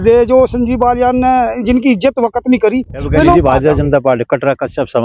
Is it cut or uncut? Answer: cut